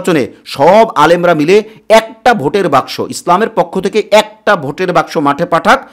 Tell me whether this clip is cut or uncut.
uncut